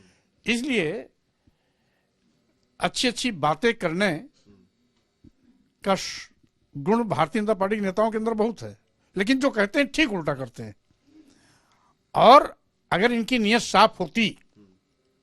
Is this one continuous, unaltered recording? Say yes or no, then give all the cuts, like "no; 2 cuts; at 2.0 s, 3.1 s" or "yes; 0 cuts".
yes; 0 cuts